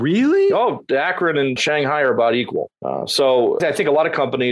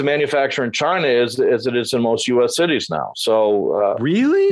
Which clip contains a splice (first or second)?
first